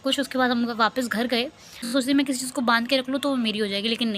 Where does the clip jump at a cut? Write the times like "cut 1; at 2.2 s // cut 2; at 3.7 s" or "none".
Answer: cut 1; at 1.9 s